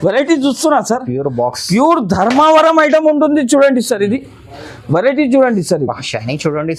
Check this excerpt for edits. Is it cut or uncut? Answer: uncut